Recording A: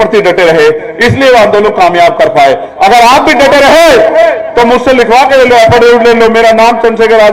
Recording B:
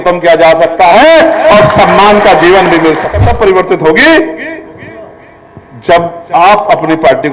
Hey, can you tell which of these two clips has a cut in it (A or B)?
B